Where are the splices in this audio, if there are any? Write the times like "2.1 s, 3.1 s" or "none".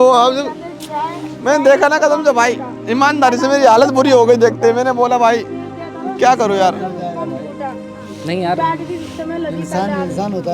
none